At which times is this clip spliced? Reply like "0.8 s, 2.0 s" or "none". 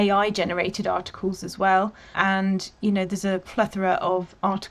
2.1 s